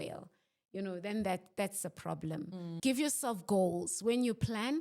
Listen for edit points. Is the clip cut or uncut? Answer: cut